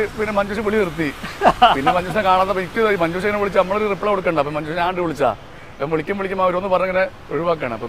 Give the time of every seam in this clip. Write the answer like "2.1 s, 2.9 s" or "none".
none